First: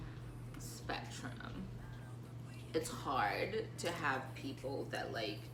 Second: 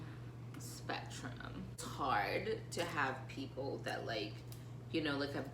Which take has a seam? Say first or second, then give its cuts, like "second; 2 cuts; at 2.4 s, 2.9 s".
second; 1 cut; at 1.8 s